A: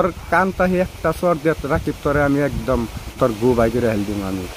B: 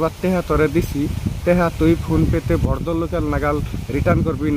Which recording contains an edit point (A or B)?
A